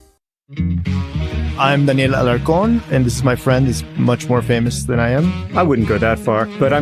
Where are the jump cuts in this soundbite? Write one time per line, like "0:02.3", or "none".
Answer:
none